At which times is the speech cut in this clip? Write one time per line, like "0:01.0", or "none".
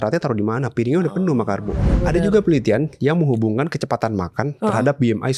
0:02.0